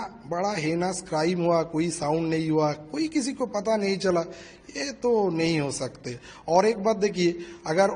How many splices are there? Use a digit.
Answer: 0